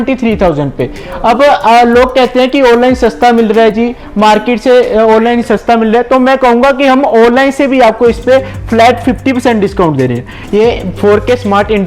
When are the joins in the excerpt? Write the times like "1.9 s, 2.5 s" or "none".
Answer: 10.4 s